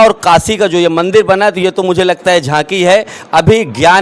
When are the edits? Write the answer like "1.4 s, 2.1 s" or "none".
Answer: none

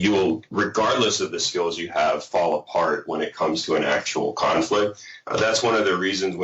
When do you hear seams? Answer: none

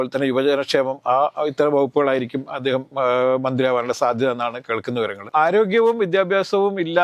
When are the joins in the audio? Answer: 5.3 s

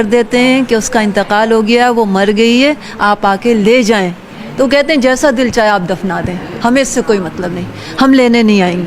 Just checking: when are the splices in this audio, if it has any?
none

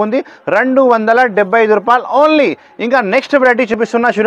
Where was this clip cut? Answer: none

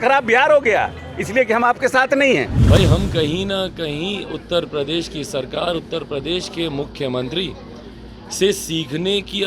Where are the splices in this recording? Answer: 2.6 s

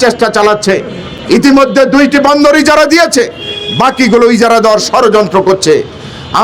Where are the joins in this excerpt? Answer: none

